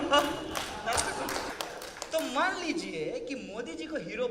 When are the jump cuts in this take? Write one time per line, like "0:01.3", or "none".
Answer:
0:01.5